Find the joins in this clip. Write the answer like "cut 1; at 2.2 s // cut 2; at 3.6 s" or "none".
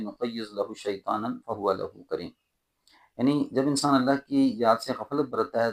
none